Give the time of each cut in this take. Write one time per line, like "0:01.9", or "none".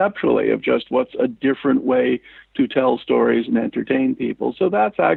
none